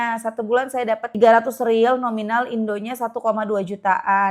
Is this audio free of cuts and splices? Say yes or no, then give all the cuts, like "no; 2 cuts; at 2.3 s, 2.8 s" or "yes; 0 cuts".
no; 1 cut; at 1.2 s